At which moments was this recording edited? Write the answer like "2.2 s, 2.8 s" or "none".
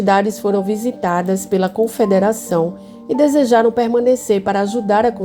none